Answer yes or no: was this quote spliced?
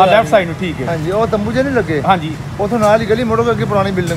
no